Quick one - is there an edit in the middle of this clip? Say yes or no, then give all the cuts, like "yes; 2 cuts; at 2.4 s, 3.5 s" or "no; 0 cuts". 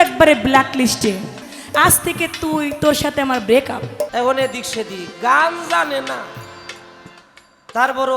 yes; 2 cuts; at 1.5 s, 4.1 s